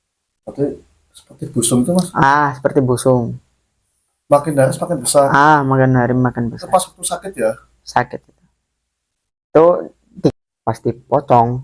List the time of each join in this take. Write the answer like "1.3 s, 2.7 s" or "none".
10.3 s